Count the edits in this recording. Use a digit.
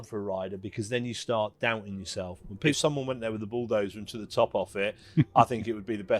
1